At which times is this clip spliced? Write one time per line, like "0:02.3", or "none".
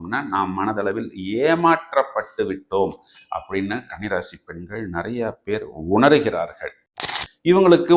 0:06.7